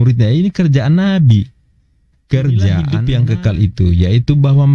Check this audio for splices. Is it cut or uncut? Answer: cut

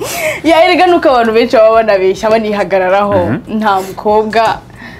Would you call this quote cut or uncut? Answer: uncut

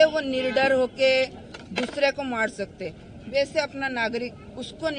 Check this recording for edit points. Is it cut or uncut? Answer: uncut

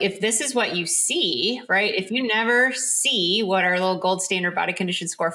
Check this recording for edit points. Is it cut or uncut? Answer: uncut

